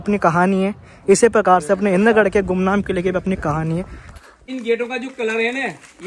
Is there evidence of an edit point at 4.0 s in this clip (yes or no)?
yes